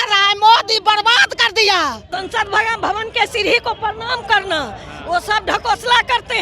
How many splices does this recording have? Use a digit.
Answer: 1